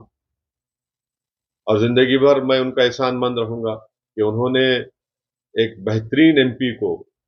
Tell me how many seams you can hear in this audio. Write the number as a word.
zero